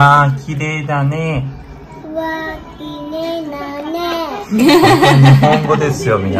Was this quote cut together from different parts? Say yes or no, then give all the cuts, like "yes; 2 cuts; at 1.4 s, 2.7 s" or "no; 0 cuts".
no; 0 cuts